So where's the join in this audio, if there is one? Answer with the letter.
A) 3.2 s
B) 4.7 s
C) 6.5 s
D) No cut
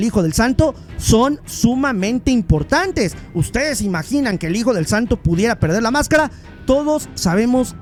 D